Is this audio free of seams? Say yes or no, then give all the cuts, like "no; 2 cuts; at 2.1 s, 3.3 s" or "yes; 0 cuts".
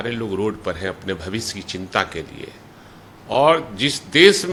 yes; 0 cuts